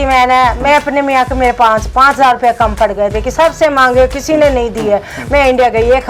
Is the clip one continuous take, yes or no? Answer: yes